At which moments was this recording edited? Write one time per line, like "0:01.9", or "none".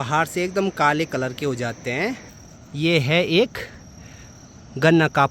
0:02.3